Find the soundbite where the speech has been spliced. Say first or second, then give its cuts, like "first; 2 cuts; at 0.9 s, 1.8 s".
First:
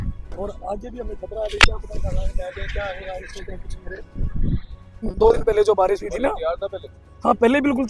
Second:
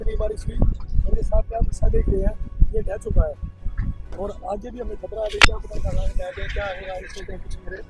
first; 1 cut; at 5.0 s